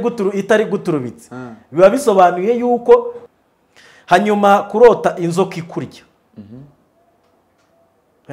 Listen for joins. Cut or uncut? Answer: cut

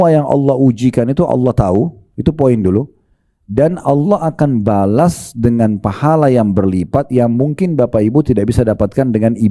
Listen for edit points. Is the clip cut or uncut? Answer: uncut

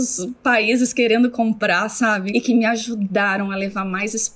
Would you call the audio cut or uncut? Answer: cut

